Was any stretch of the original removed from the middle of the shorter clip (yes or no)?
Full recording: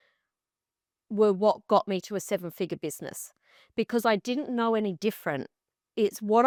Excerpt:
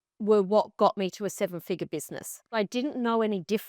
yes